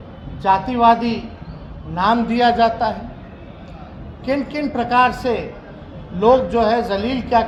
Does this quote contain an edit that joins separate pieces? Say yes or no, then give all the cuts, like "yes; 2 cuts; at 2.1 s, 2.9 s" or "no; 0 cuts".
no; 0 cuts